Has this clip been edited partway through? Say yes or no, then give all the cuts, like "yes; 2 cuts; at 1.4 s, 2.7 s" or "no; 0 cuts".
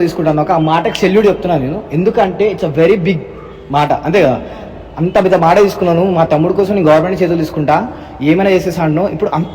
no; 0 cuts